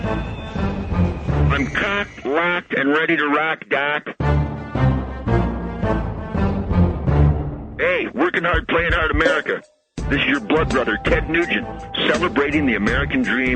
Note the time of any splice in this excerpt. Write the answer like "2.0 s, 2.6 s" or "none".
1.3 s